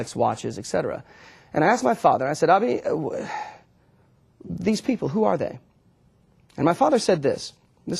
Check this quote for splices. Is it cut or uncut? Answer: cut